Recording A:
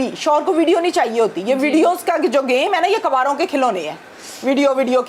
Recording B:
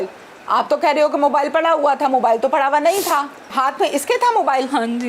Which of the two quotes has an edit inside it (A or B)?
B